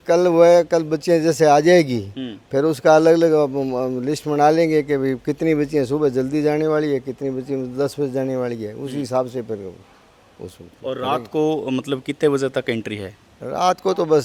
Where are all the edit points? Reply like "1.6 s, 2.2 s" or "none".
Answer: none